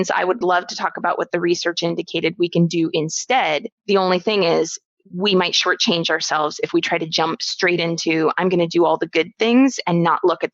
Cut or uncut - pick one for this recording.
cut